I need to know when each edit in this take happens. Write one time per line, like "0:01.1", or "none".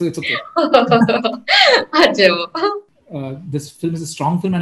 0:02.9